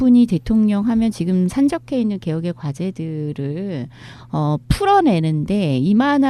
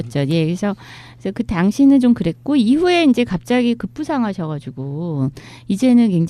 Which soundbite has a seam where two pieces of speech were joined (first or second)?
first